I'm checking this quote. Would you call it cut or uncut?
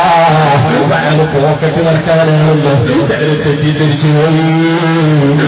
cut